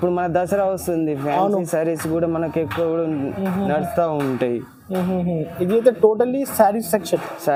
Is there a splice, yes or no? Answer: no